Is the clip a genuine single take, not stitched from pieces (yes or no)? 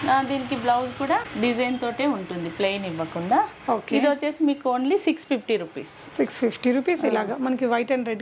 yes